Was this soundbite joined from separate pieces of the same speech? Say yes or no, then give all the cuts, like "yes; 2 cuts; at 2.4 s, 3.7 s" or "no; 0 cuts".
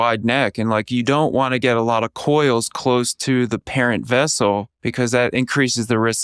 yes; 1 cut; at 4.8 s